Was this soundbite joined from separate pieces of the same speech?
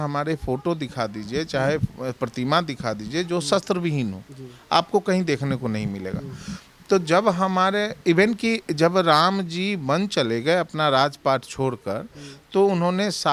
no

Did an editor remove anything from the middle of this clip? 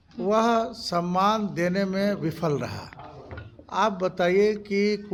no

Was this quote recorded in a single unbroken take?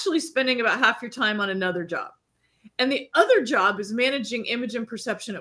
yes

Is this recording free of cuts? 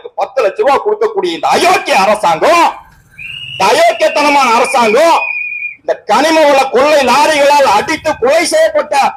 yes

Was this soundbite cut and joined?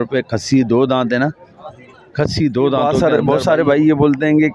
yes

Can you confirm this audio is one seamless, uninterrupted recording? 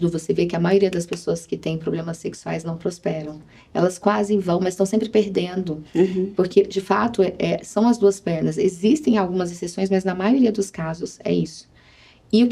yes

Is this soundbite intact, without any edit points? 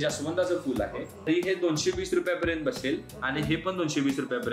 no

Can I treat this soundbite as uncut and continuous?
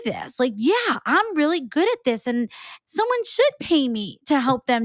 no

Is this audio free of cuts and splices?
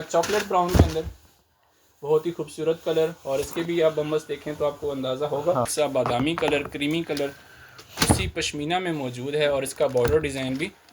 no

